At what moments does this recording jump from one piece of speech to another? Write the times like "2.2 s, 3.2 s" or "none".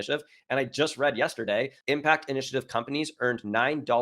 1.8 s